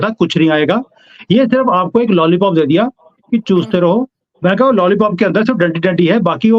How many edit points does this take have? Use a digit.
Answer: 0